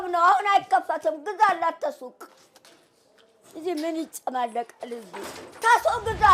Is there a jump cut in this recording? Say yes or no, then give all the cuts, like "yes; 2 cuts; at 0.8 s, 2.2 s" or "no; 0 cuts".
no; 0 cuts